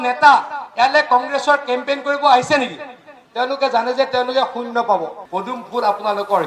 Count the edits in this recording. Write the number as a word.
one